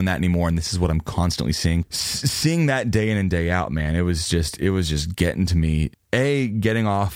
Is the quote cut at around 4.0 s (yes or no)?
no